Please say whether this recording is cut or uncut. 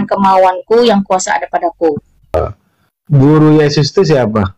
cut